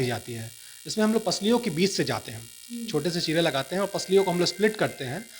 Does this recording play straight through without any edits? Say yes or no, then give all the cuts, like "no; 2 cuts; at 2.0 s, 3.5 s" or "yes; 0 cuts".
yes; 0 cuts